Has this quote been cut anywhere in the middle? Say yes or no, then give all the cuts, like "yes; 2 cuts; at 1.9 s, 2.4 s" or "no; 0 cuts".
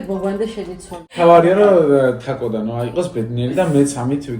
yes; 1 cut; at 1.0 s